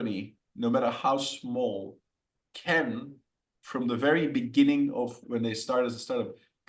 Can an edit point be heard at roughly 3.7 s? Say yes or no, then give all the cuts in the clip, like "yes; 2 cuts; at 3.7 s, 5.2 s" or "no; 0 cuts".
no; 1 cut; at 5.2 s